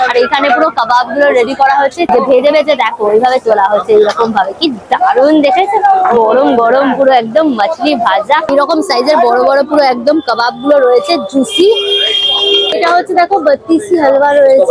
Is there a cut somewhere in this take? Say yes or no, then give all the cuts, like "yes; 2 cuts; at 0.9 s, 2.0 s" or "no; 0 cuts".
yes; 3 cuts; at 2.1 s, 8.5 s, 12.7 s